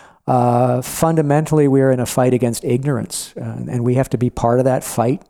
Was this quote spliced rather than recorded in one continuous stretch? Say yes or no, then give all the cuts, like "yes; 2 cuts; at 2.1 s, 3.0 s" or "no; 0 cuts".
no; 0 cuts